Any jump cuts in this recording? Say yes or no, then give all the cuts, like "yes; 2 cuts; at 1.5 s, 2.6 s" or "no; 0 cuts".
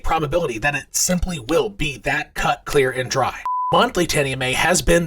yes; 1 cut; at 3.6 s